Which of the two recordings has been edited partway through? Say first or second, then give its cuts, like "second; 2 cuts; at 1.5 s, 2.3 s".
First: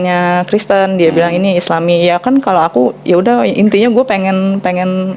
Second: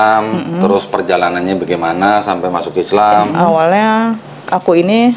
second; 1 cut; at 3.3 s